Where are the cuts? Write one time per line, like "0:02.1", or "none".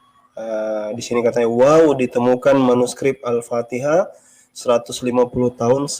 none